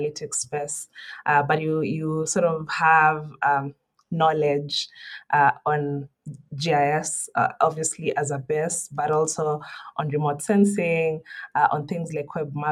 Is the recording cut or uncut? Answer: uncut